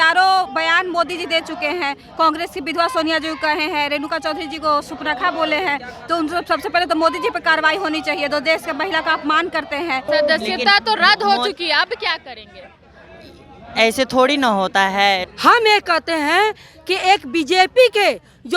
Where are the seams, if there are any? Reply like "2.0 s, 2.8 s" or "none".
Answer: 10.1 s, 15.3 s